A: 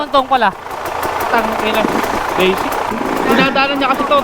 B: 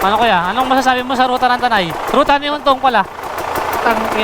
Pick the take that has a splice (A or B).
A